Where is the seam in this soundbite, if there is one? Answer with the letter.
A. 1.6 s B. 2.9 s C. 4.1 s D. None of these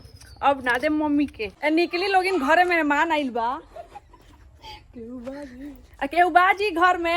A